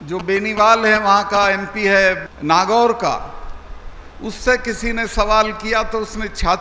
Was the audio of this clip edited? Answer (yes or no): yes